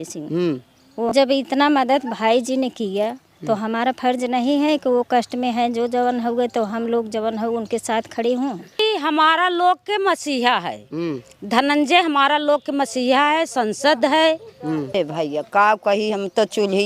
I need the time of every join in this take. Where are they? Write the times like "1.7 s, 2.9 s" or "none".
1.1 s, 8.8 s, 14.9 s